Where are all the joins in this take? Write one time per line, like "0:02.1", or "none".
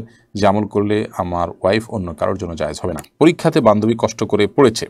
0:03.0